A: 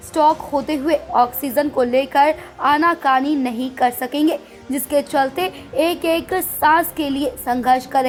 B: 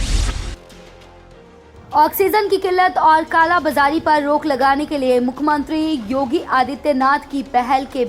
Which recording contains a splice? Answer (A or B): B